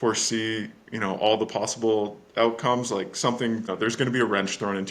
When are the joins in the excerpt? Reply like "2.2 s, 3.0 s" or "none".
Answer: 3.7 s